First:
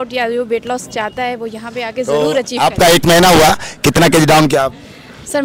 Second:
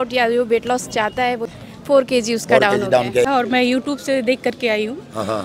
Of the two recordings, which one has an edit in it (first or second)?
second